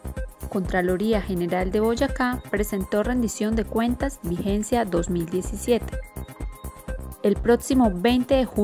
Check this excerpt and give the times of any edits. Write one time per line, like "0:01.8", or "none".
0:05.8
0:07.2

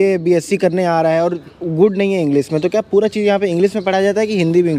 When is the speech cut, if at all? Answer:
none

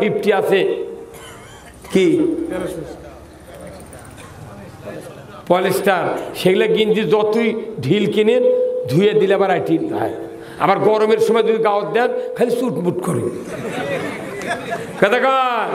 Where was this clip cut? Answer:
none

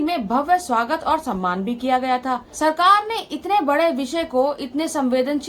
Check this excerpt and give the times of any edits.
0:02.5

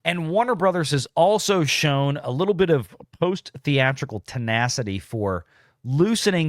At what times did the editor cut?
none

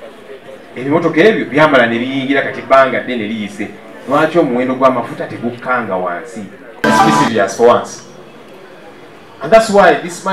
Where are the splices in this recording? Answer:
0:06.7

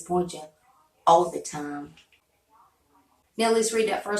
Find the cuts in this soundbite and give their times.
0:02.3
0:03.2

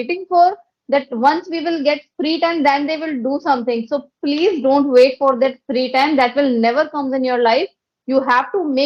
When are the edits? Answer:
none

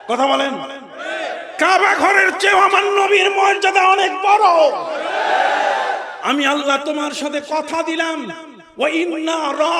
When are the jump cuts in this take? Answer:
0:06.1

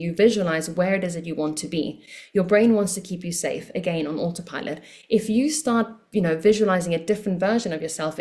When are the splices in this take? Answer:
none

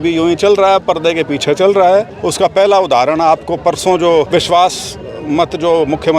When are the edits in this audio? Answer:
0:02.2
0:04.3

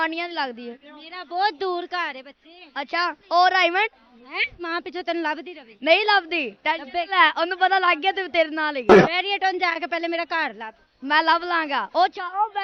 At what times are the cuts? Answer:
0:04.5
0:09.0

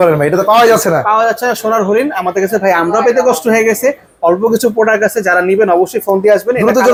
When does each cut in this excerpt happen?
none

